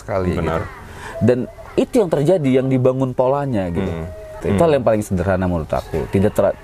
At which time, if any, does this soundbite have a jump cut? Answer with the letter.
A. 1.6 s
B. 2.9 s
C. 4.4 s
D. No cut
D